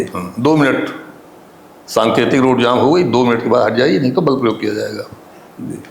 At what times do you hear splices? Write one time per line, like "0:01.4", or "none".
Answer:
none